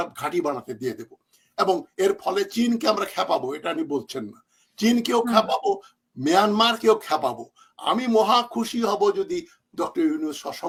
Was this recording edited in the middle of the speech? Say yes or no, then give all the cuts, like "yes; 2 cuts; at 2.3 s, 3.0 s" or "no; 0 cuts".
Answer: no; 0 cuts